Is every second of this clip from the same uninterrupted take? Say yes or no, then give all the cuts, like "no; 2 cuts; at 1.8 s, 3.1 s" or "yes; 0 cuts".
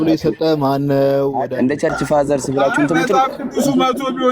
no; 1 cut; at 1.5 s